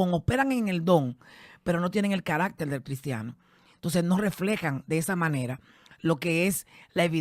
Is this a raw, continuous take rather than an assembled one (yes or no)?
yes